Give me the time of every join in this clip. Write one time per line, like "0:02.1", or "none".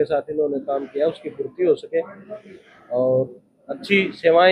none